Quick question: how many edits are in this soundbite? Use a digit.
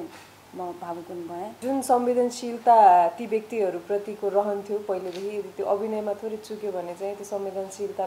1